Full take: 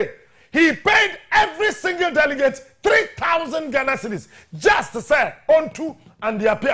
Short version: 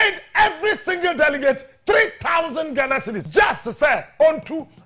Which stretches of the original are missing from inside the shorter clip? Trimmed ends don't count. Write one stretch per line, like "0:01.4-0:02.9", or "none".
0:04.1-0:04.5